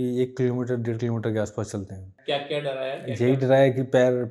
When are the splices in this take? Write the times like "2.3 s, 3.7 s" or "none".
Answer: 2.1 s